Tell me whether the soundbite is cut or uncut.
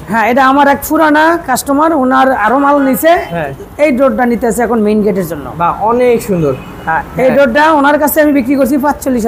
uncut